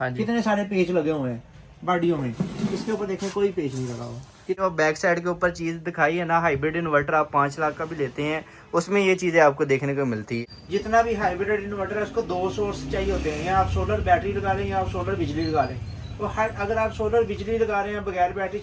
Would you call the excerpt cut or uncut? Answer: cut